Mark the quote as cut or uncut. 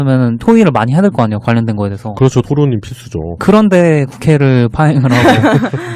uncut